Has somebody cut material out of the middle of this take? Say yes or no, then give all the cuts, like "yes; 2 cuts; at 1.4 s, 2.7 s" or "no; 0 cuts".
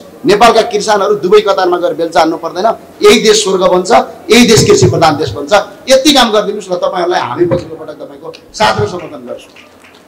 no; 0 cuts